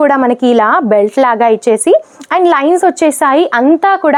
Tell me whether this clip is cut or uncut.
uncut